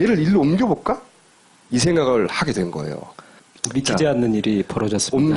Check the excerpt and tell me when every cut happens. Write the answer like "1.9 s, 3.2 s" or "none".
none